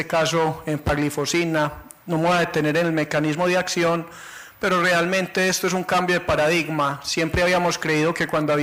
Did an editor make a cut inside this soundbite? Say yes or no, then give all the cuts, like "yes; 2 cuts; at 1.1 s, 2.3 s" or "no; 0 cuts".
yes; 1 cut; at 4.5 s